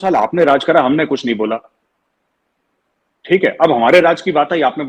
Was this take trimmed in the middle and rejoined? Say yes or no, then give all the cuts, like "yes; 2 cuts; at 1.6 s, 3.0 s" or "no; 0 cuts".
no; 0 cuts